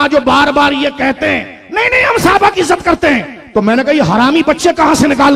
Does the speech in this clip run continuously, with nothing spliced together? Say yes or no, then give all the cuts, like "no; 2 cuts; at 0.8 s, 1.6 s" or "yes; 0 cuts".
yes; 0 cuts